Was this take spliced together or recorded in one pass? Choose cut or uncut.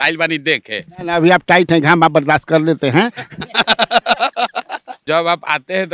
cut